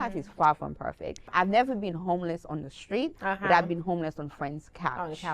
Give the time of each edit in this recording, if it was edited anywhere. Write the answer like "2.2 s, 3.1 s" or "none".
1.3 s